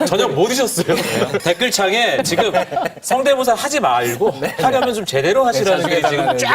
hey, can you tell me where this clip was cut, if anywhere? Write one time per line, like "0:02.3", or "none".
0:01.4